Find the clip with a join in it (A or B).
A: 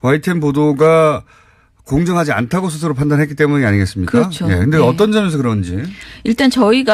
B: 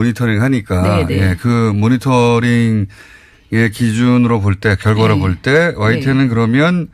B